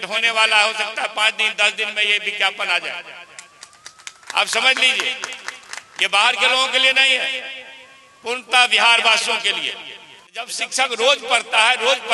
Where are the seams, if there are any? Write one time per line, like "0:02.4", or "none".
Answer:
0:10.6